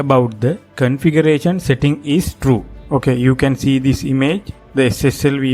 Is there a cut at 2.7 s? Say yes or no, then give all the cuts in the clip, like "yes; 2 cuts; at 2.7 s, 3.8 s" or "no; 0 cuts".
yes; 2 cuts; at 2.7 s, 4.6 s